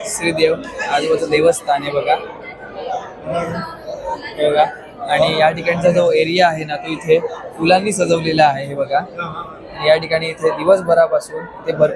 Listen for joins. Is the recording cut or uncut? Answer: uncut